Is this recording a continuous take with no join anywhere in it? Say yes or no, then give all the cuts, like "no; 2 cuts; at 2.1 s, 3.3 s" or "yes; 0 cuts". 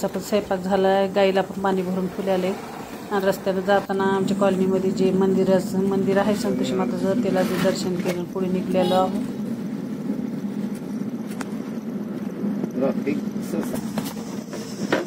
yes; 0 cuts